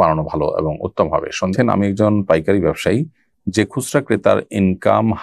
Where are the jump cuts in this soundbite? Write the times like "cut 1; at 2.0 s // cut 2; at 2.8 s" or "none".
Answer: cut 1; at 1.5 s